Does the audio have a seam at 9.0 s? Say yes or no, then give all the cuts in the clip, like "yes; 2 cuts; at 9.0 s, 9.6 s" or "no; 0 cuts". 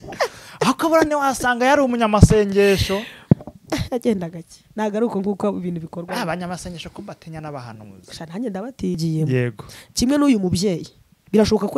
yes; 1 cut; at 9.0 s